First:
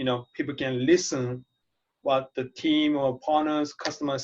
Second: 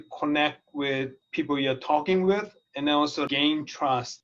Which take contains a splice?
second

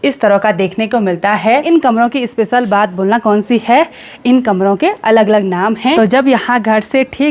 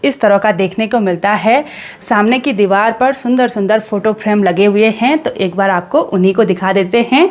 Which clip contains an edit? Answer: first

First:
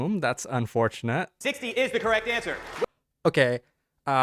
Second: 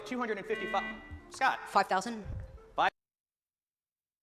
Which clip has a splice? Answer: first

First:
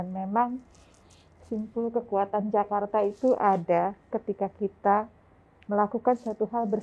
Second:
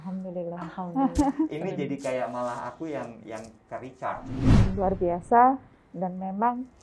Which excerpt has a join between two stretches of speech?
second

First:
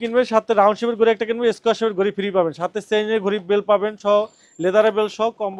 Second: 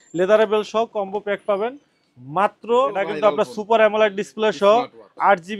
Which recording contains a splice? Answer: second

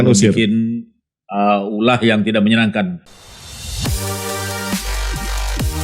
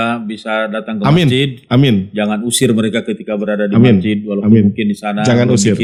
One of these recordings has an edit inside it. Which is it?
first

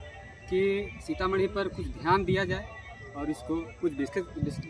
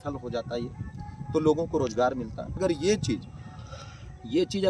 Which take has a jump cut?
second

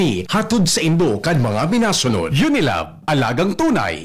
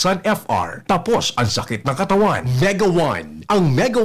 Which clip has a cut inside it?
second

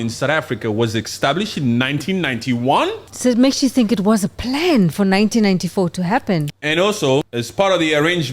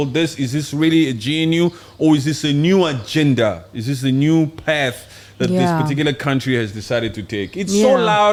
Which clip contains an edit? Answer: first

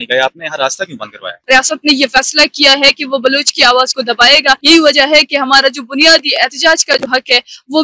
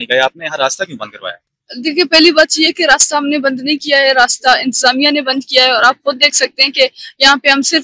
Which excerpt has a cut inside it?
first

